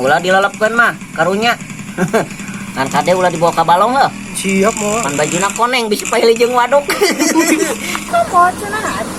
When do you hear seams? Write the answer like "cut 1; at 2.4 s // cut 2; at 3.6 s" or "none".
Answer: cut 1; at 8.0 s